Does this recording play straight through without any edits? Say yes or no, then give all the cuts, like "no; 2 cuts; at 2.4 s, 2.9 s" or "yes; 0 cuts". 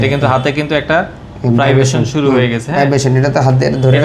yes; 0 cuts